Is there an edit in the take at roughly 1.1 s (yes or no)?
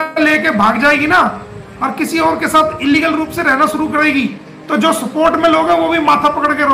no